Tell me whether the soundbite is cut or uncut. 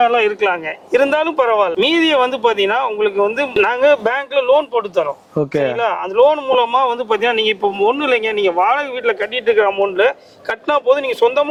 uncut